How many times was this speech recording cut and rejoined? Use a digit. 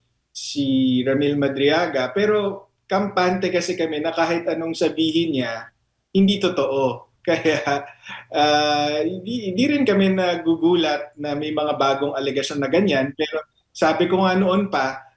0